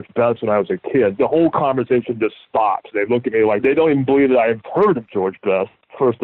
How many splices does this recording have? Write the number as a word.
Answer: two